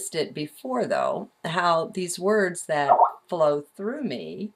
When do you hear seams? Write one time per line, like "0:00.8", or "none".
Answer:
0:03.2